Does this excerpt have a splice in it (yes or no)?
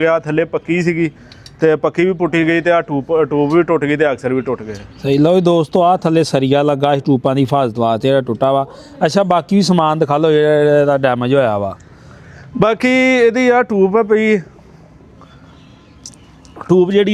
no